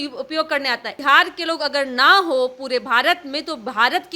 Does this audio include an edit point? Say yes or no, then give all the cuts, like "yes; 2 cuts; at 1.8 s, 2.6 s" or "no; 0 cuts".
yes; 1 cut; at 0.9 s